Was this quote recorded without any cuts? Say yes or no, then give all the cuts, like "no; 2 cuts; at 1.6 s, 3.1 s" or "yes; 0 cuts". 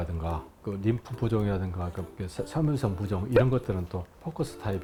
yes; 0 cuts